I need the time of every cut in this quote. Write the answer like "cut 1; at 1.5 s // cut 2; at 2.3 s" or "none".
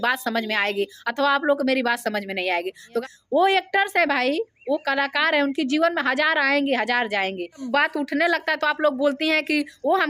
cut 1; at 2.8 s // cut 2; at 7.6 s